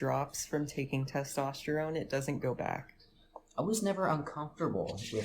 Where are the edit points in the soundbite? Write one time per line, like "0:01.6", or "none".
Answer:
0:03.4